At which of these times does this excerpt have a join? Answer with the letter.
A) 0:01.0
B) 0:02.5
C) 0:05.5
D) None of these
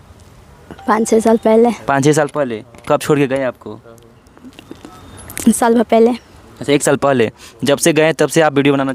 D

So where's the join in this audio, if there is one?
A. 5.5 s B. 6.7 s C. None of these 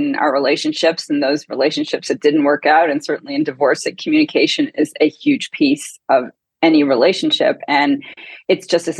C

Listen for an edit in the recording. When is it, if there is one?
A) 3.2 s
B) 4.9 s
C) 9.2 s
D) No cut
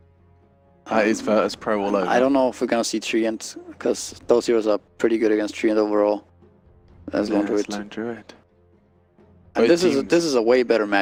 D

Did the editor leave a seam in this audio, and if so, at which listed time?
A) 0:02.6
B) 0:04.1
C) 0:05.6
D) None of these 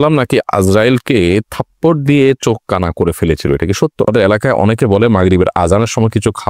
B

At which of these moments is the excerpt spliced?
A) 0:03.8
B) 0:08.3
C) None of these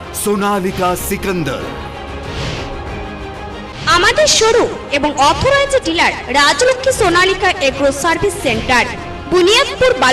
A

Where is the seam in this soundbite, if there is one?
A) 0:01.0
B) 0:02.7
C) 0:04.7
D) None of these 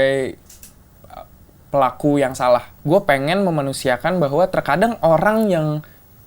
B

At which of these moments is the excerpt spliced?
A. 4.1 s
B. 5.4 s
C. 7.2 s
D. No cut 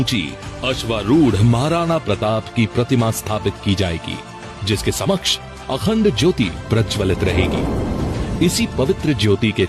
A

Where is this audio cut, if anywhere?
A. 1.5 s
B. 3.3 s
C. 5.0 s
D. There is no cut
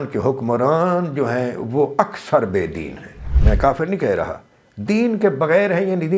B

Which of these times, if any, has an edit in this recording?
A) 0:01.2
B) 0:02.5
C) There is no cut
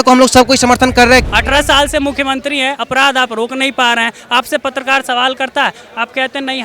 A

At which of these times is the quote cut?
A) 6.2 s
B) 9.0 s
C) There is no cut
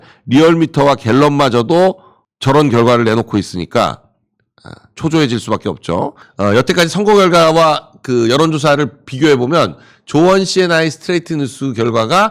A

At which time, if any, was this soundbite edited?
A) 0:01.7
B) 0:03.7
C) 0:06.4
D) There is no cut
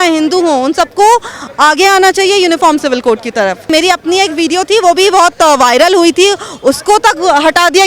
B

